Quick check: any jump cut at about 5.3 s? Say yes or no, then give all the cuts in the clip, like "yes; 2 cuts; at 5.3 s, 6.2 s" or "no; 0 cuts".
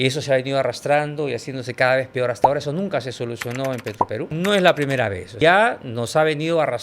yes; 2 cuts; at 4.3 s, 5.3 s